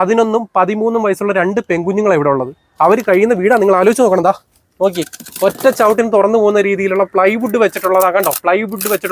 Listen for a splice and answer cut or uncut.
uncut